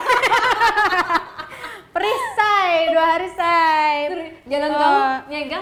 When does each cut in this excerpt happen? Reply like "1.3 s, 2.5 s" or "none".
none